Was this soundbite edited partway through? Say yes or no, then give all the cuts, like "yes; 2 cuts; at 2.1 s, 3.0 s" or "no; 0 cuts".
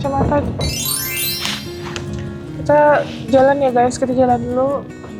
no; 0 cuts